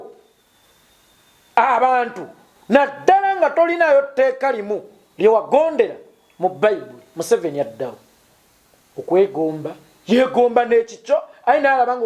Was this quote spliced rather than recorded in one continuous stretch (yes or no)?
no